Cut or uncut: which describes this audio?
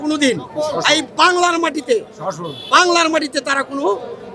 uncut